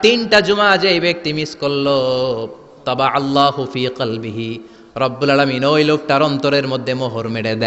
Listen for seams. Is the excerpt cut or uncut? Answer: uncut